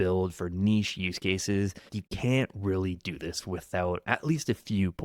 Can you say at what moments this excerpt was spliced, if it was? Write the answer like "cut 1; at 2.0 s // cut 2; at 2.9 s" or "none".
cut 1; at 2.0 s